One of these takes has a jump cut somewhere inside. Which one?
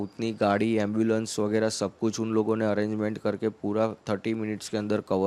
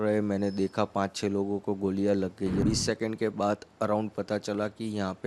second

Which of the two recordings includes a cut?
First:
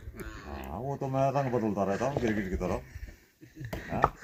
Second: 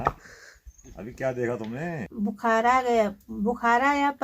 second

